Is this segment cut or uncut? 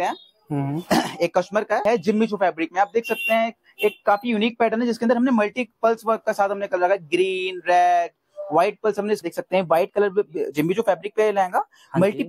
cut